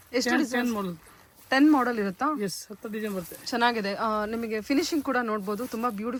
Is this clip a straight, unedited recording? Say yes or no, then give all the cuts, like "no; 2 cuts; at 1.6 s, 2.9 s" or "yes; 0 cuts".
yes; 0 cuts